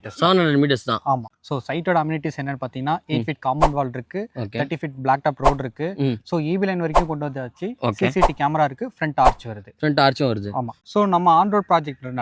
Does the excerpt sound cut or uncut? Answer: cut